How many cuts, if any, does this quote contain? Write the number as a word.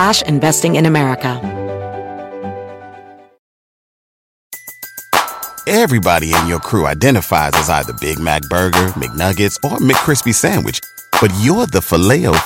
one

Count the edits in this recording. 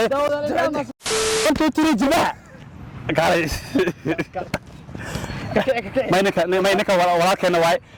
one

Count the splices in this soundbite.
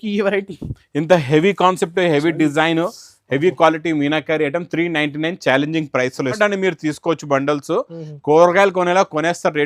one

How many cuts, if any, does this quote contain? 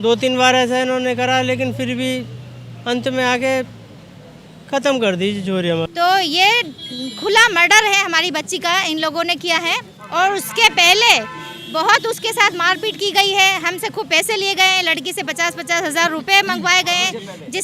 one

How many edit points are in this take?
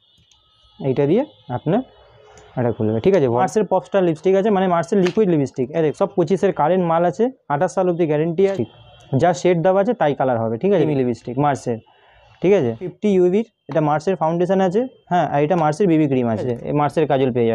six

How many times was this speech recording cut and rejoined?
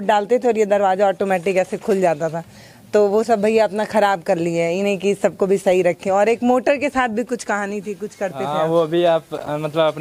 zero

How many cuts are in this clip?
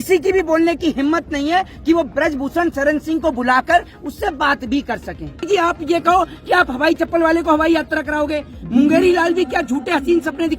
one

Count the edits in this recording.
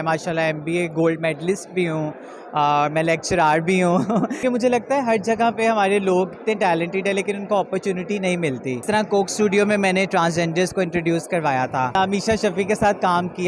three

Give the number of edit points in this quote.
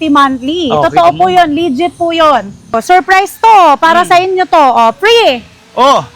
one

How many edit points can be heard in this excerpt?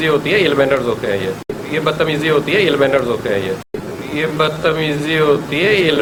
zero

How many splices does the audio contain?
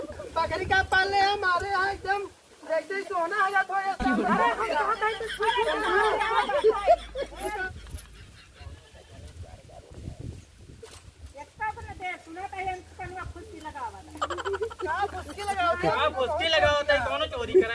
zero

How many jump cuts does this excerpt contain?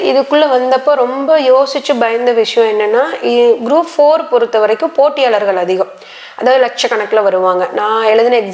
zero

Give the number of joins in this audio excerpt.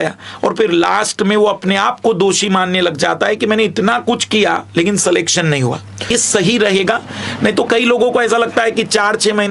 one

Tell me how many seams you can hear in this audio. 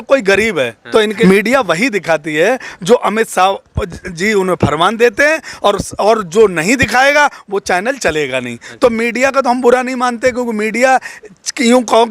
one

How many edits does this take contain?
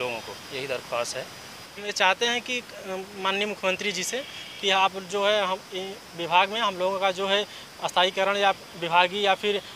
one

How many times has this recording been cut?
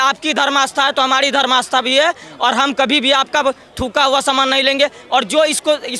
zero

